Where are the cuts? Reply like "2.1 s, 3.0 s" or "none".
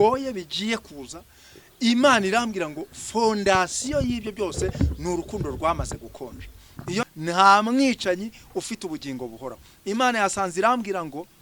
7.0 s